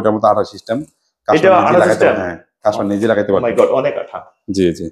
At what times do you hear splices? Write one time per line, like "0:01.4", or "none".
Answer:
none